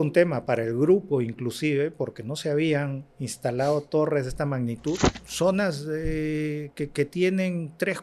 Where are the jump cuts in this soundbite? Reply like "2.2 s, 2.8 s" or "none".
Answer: 5.2 s